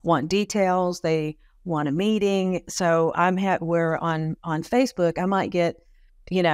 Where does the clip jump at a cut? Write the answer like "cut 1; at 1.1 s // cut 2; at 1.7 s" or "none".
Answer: none